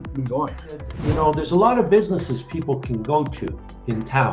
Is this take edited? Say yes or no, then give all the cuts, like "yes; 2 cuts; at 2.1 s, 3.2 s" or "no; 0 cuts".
yes; 1 cut; at 0.9 s